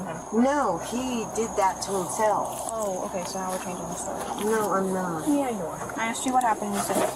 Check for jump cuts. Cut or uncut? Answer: uncut